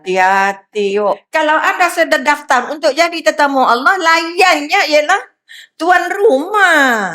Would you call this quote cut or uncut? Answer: cut